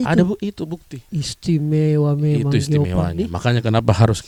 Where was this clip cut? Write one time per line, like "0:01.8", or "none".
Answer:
none